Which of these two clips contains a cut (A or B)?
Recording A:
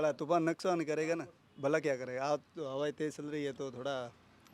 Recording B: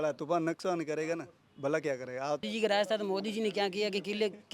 B